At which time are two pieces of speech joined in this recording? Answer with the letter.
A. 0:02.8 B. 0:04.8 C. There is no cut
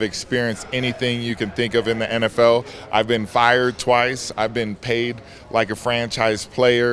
C